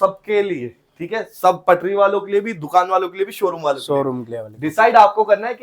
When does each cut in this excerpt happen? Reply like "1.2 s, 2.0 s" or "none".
none